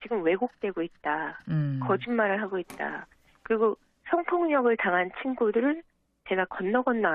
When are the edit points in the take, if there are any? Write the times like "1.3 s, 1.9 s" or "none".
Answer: none